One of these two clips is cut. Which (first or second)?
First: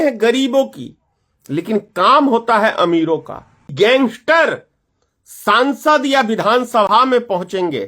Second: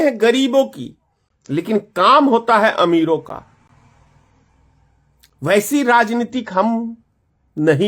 first